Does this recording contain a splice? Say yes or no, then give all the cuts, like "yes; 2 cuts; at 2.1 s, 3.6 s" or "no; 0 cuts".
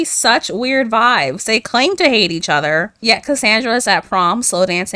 no; 0 cuts